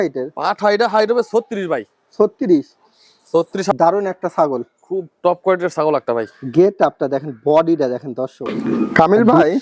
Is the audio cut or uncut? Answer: cut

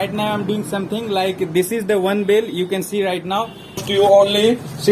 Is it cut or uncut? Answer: cut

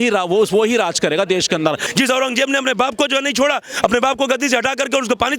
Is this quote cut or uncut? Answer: cut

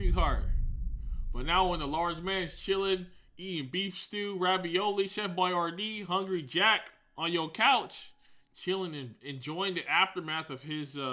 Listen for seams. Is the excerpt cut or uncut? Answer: uncut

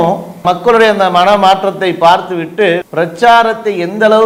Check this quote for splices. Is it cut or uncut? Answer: uncut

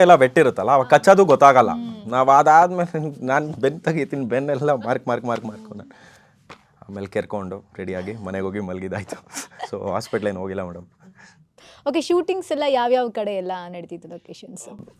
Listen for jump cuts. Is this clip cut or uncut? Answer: uncut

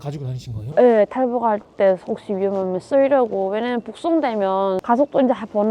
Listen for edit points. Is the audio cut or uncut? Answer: cut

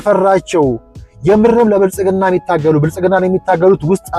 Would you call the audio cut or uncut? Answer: uncut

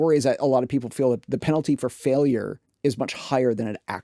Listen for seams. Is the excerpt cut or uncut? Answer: cut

